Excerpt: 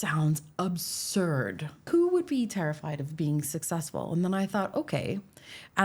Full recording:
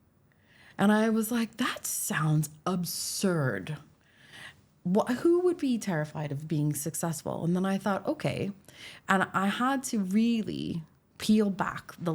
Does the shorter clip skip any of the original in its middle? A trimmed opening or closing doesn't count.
yes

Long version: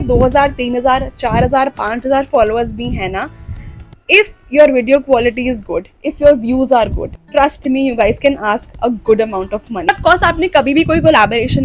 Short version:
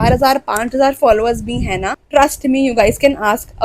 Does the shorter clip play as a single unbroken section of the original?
no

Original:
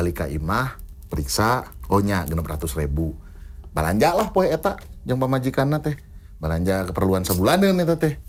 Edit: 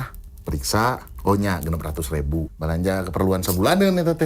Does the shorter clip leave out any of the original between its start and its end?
yes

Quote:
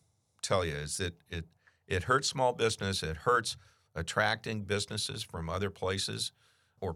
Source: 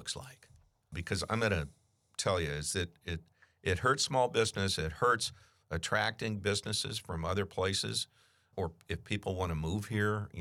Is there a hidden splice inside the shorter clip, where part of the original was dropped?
no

